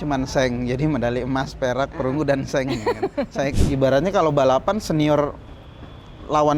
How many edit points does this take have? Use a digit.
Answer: 1